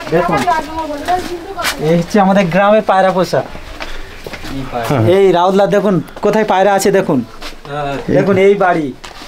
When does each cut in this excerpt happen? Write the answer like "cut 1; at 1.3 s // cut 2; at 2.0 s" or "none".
none